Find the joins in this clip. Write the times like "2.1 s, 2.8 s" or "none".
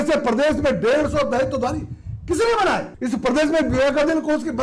2.9 s